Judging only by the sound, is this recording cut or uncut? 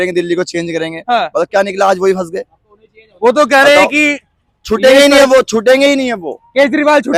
uncut